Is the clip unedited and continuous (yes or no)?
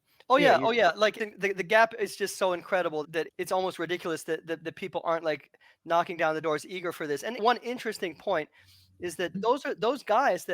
no